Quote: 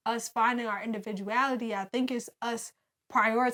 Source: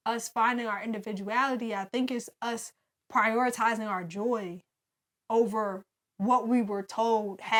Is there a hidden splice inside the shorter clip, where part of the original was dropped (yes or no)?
no